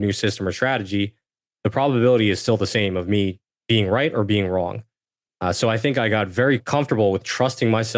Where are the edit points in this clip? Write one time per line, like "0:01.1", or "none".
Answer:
0:03.5
0:06.6